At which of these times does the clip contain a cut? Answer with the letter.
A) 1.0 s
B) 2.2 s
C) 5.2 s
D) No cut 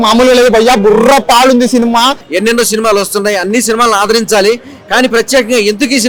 B